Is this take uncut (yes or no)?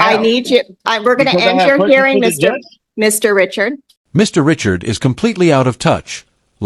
yes